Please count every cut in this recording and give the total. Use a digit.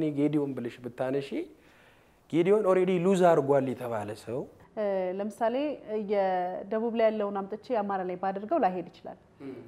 1